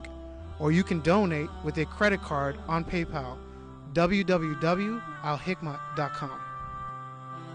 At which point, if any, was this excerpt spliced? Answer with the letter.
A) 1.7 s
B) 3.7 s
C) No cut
C